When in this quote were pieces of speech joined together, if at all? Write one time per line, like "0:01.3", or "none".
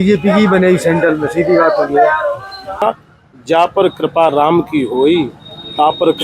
0:02.8